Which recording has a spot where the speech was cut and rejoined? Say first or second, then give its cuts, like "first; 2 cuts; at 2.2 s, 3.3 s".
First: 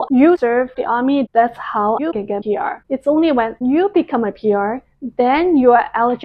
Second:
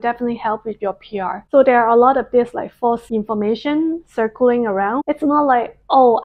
second; 2 cuts; at 1.4 s, 5.0 s